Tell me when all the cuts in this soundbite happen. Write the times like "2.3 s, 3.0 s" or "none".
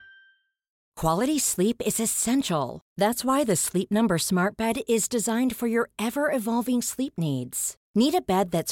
0.9 s